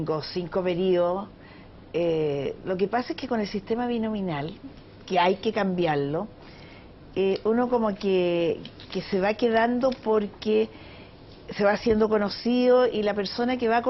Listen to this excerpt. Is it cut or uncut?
cut